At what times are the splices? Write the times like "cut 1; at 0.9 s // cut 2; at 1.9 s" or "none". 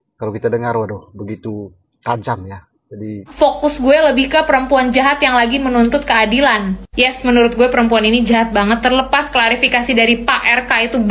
cut 1; at 3.3 s